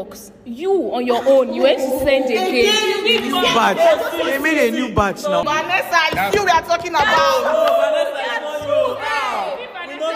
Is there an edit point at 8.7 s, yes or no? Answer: no